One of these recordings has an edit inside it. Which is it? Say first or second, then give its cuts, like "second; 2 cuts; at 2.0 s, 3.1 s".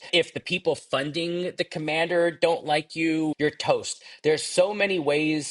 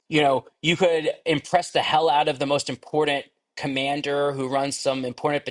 first; 1 cut; at 3.3 s